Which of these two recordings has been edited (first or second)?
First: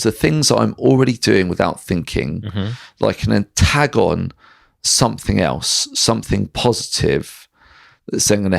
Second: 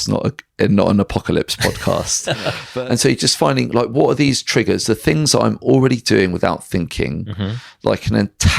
second